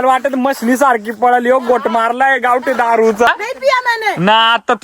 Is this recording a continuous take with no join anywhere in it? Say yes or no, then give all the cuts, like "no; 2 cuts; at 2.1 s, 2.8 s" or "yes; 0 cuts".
no; 1 cut; at 3.3 s